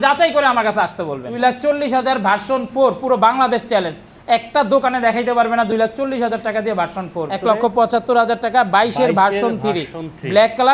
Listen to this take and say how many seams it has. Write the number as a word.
two